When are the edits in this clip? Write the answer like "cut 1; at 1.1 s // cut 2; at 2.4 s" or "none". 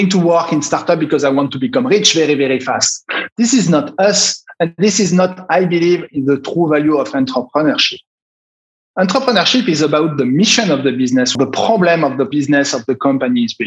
cut 1; at 11.3 s // cut 2; at 12.3 s